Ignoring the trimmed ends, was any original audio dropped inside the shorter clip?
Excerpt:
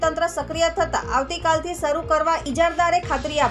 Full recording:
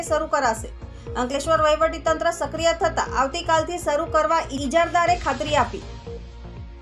yes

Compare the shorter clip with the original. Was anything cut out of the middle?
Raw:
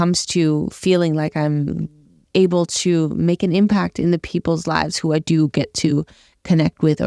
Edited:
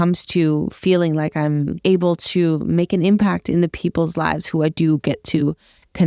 yes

